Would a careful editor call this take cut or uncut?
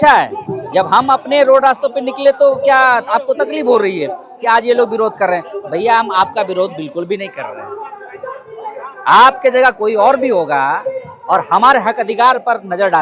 uncut